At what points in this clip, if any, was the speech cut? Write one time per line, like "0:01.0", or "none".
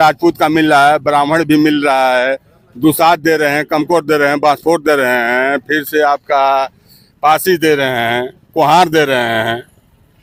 none